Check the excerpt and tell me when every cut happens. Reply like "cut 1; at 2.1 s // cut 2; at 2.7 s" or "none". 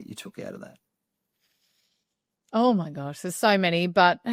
none